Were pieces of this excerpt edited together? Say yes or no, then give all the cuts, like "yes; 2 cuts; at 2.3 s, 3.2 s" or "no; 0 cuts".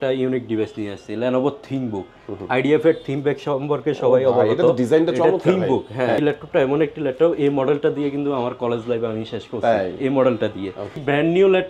yes; 2 cuts; at 6.2 s, 10.8 s